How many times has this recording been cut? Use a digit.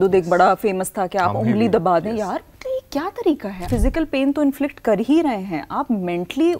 1